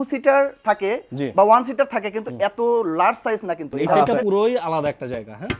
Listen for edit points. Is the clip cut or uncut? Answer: cut